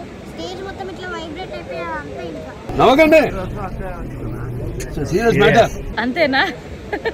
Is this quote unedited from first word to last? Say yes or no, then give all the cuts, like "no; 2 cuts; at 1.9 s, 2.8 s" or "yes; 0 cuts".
yes; 0 cuts